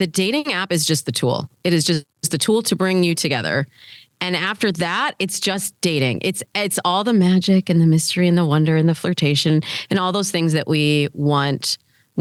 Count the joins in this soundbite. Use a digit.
0